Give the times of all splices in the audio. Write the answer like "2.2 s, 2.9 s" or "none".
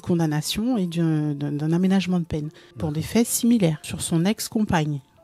2.8 s, 3.9 s

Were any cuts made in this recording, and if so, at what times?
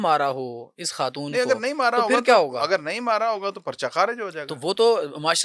none

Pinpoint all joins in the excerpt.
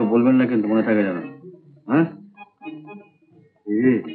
none

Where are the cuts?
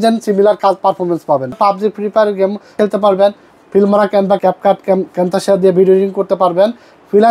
1.6 s, 2.8 s, 4.4 s

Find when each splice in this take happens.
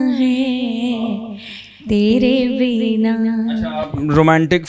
none

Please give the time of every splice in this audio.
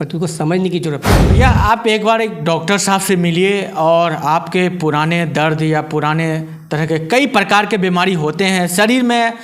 1.2 s

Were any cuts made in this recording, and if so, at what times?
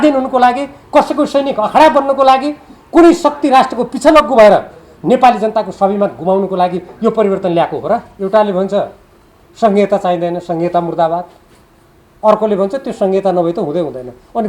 8.1 s

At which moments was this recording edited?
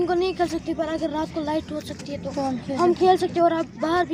none

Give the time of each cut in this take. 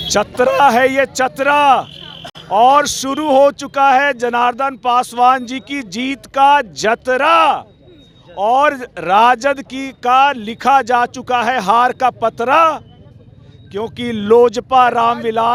none

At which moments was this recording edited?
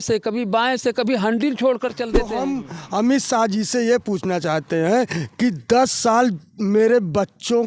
2.3 s

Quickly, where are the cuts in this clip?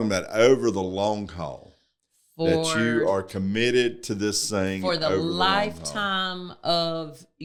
none

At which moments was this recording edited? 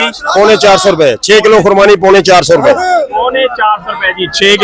none

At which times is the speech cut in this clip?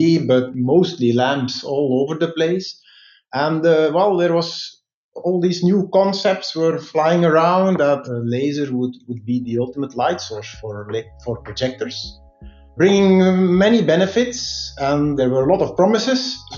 none

